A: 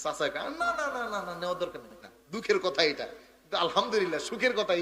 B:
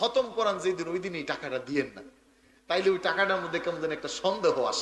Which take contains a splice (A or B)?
A